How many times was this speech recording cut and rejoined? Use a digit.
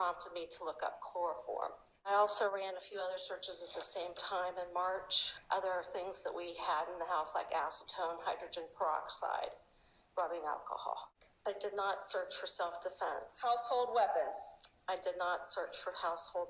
2